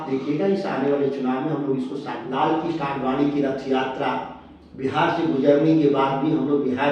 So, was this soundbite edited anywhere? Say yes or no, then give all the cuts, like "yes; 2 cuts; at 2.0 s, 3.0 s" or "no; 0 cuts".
yes; 1 cut; at 2.2 s